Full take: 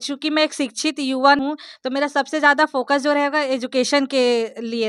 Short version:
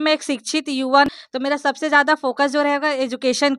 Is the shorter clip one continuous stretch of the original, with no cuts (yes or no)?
no